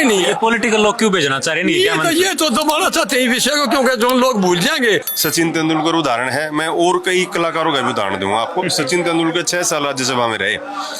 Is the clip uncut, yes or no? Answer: no